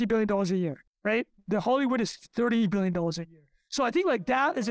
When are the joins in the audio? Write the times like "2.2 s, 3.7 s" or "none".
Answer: none